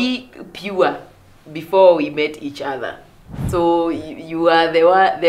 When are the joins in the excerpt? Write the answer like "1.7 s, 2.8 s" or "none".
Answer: 3.3 s

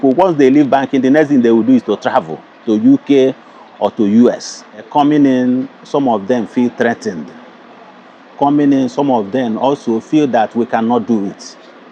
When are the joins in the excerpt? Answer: 4.8 s

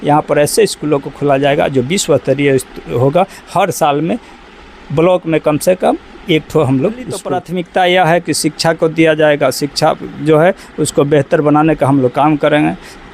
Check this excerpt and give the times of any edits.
7.4 s

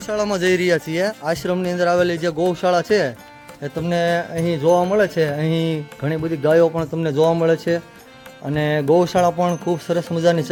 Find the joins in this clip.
none

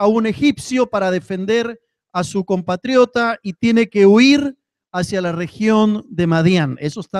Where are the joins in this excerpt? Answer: none

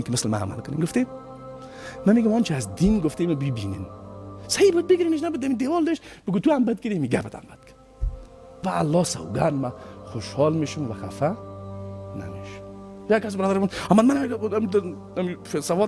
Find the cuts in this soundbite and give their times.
none

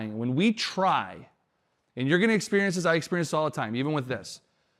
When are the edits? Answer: none

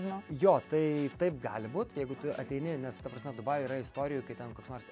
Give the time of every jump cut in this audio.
none

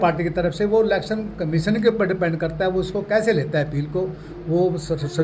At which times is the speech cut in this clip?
none

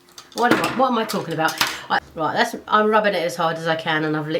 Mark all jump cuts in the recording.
2.0 s

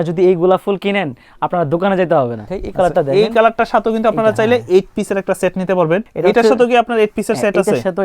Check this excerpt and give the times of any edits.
2.6 s, 6.1 s

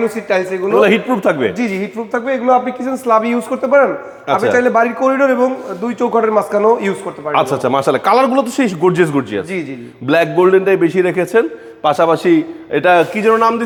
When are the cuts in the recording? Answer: none

